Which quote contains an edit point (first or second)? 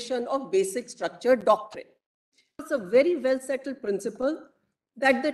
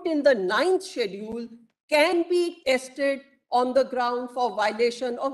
first